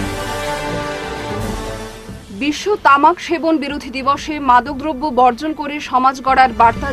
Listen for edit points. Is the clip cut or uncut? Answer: uncut